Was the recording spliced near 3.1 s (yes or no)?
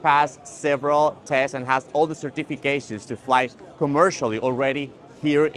no